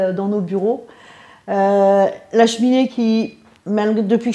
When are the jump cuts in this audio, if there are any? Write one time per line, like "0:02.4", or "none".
none